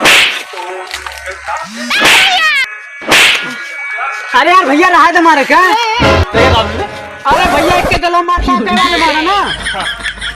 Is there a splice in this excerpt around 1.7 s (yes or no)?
yes